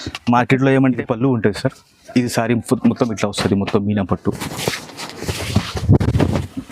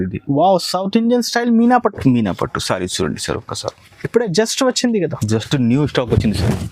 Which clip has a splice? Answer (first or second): first